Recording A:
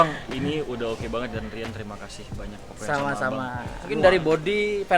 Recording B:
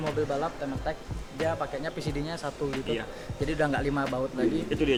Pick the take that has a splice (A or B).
A